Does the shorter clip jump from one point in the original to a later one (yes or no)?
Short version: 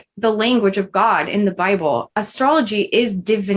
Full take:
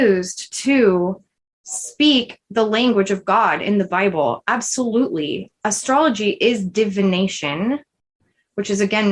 yes